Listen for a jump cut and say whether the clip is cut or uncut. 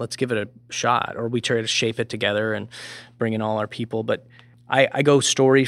uncut